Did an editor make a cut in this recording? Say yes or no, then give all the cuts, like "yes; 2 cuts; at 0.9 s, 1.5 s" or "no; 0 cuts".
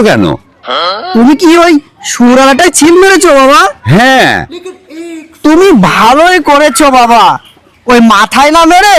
no; 0 cuts